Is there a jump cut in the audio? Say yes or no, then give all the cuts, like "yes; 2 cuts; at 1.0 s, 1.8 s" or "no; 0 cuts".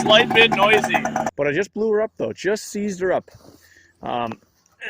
yes; 1 cut; at 1.3 s